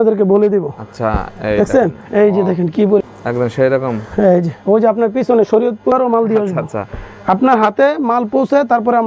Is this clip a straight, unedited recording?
no; 2 cuts; at 3.0 s, 5.9 s

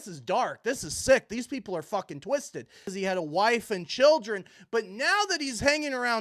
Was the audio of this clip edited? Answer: yes; 1 cut; at 2.9 s

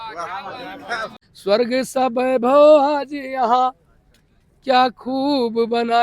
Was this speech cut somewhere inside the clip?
yes; 1 cut; at 1.1 s

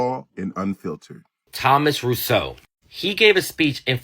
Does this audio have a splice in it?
yes; 1 cut; at 1.5 s

